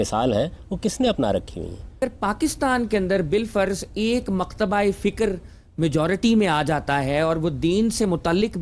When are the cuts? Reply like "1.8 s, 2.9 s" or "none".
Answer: 1.9 s